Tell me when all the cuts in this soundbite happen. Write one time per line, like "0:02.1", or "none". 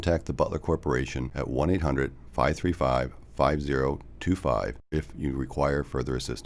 0:04.9